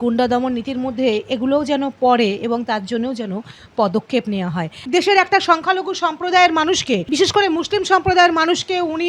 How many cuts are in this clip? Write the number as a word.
two